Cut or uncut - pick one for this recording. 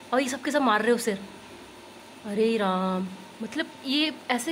cut